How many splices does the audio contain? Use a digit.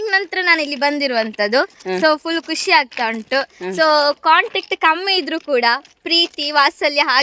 0